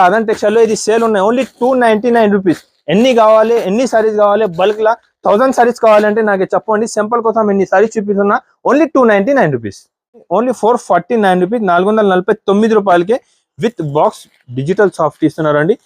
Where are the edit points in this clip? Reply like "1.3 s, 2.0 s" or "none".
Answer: 10.2 s